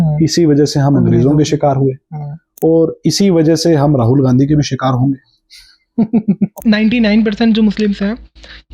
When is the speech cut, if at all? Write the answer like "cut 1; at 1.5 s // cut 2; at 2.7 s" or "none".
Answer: cut 1; at 6.5 s

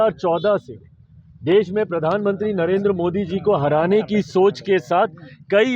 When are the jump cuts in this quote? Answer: none

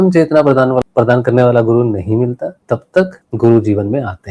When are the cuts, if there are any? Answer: cut 1; at 0.8 s // cut 2; at 2.9 s

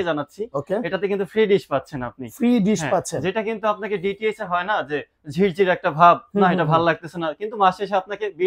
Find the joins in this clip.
none

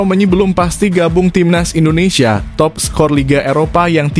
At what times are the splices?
none

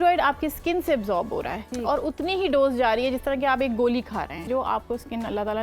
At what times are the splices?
cut 1; at 4.5 s

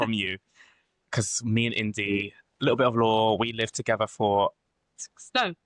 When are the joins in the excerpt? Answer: none

